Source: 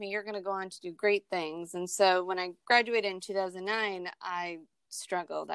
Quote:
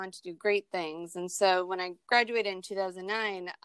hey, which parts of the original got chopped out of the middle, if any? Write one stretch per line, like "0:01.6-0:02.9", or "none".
none